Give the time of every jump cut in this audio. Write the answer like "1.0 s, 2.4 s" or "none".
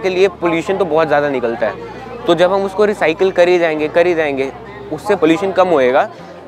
5.2 s